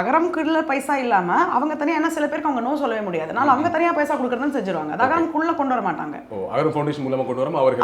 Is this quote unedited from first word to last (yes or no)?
yes